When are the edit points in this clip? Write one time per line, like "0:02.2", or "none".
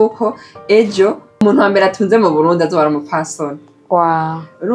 0:01.4